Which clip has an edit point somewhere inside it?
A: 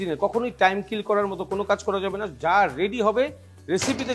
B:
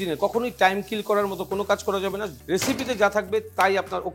B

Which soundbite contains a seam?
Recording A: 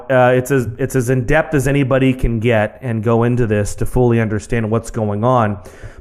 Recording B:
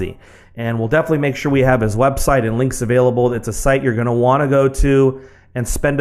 A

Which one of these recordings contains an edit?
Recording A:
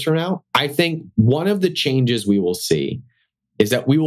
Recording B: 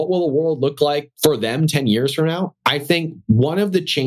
B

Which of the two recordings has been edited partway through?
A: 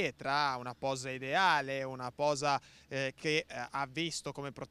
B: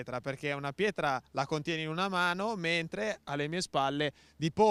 B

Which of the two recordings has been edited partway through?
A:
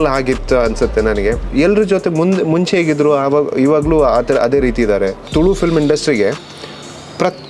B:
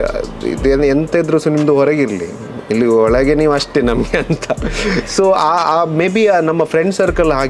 A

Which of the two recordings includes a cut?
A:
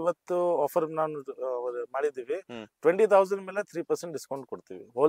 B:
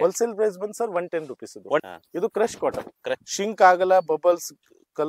B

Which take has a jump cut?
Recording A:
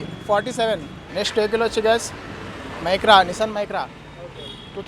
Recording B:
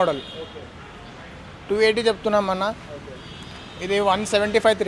A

